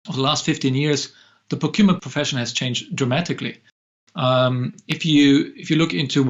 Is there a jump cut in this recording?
yes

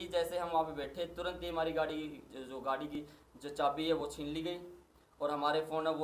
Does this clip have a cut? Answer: no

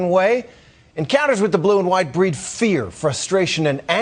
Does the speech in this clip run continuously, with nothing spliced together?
no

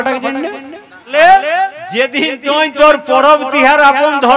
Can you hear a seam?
yes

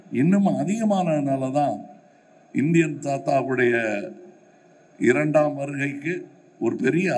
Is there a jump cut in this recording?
no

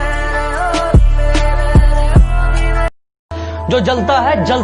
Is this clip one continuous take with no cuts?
no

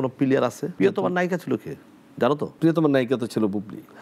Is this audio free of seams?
no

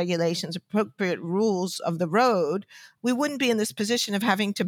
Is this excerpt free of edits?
no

